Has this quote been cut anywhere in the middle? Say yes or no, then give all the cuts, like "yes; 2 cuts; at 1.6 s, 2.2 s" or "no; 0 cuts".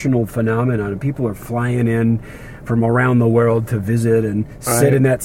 no; 0 cuts